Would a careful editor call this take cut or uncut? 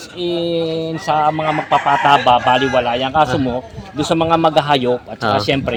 uncut